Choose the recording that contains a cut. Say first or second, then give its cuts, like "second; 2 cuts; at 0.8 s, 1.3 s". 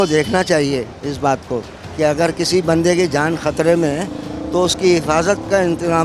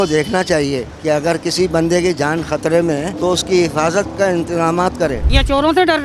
second; 3 cuts; at 0.9 s, 3.1 s, 5.3 s